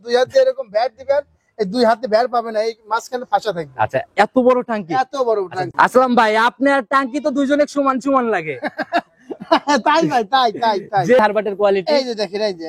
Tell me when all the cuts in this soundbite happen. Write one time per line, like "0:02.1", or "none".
0:05.7
0:11.2